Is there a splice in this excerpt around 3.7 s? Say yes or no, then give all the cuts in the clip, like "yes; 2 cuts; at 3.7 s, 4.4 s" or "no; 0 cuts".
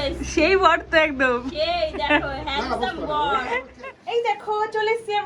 yes; 1 cut; at 3.7 s